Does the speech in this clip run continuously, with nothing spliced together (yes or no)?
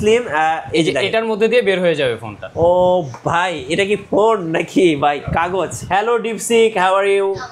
no